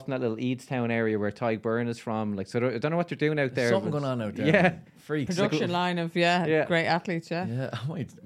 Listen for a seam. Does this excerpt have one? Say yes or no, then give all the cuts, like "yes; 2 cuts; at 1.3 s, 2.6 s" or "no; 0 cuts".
no; 0 cuts